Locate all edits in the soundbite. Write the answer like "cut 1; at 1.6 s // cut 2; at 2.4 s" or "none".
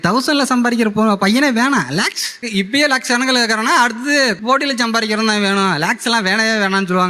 cut 1; at 2.4 s